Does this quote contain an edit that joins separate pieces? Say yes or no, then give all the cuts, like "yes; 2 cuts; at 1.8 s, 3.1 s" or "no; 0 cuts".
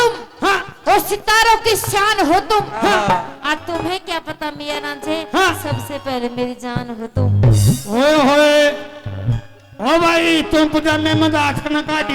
no; 0 cuts